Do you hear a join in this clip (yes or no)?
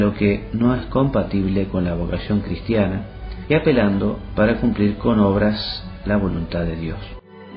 yes